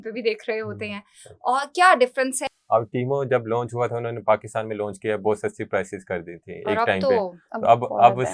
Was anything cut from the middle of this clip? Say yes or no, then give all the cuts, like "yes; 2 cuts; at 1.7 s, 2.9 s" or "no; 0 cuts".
yes; 1 cut; at 2.5 s